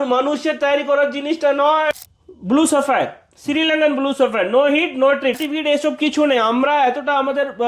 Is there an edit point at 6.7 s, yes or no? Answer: no